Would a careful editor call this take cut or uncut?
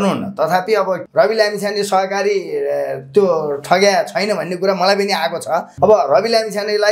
cut